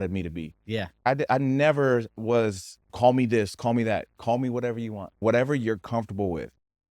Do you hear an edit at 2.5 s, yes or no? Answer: no